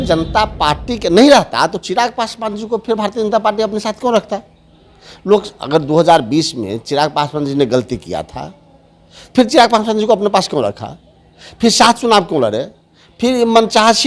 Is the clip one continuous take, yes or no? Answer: yes